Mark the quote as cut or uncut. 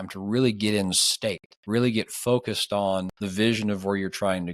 cut